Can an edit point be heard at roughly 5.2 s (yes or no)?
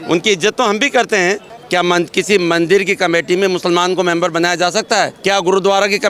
yes